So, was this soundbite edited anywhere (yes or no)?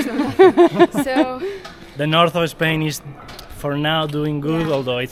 no